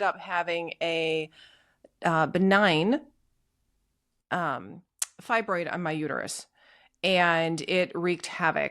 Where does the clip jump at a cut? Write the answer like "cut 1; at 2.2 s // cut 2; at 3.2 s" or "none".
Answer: none